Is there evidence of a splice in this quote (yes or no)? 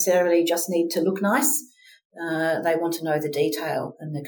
no